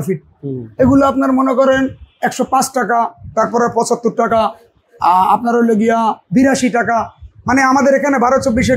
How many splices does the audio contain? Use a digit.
1